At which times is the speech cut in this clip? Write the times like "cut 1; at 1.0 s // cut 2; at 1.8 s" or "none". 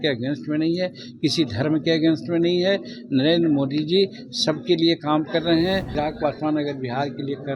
cut 1; at 5.9 s